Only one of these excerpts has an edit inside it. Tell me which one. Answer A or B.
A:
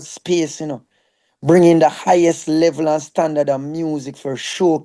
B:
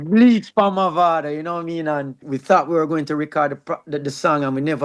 B